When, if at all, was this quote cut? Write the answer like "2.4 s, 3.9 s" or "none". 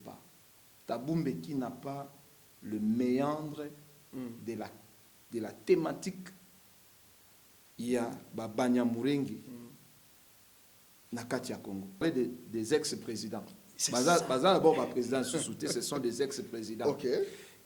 12.0 s